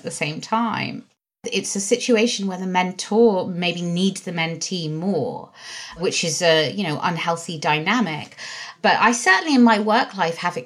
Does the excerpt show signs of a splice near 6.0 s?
yes; 3 cuts; at 1.4 s, 6.0 s, 8.7 s

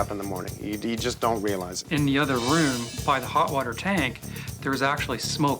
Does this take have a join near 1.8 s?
yes; 1 cut; at 1.8 s

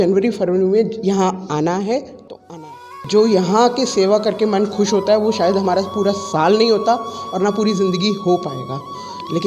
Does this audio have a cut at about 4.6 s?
no; 1 cut; at 2.5 s

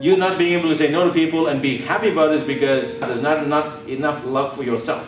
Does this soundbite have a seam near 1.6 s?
no; 1 cut; at 3.0 s

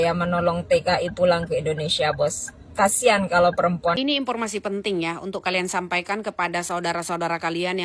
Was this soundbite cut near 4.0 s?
yes; 1 cut; at 4.0 s

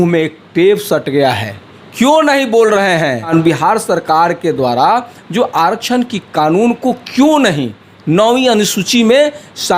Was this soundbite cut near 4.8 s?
no; 1 cut; at 3.3 s

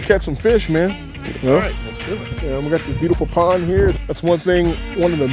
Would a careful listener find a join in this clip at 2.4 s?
no; 1 cut; at 4.0 s

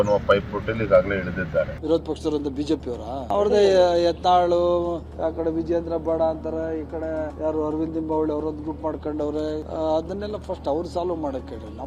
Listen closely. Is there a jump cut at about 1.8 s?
no; 0 cuts

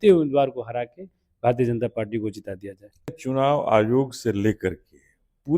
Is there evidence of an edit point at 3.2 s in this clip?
yes; 1 cut; at 3.2 s

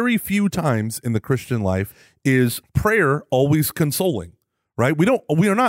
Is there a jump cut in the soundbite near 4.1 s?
no; 2 cuts; at 2.0 s, 2.6 s

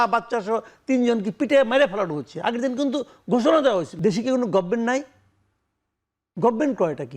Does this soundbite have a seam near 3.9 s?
yes; 1 cut; at 3.9 s

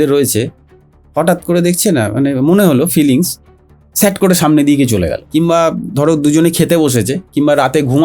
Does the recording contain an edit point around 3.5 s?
no; 1 cut; at 5.2 s

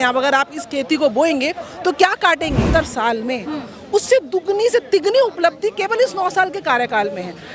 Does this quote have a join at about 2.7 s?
yes; 1 cut; at 2.7 s

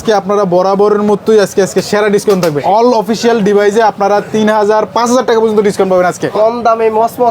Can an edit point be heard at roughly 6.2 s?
yes; 2 cuts; at 2.6 s, 6.2 s

